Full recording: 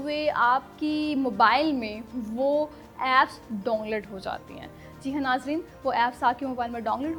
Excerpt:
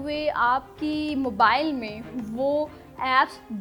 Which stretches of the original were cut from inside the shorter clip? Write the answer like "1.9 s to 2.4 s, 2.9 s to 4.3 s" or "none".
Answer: none